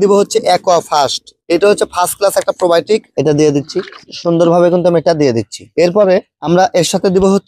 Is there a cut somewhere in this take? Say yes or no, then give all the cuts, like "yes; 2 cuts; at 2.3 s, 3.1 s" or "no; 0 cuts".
yes; 1 cut; at 3.1 s